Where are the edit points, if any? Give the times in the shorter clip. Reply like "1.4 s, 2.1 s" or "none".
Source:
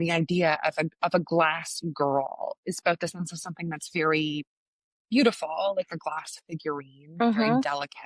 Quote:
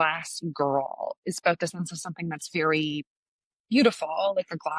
none